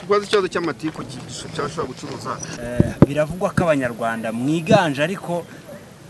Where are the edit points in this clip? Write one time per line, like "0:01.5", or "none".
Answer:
0:02.5